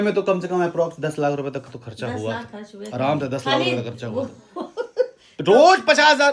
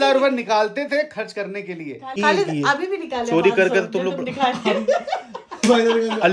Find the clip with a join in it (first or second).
second